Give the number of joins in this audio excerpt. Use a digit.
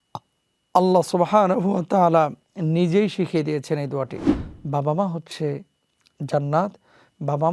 1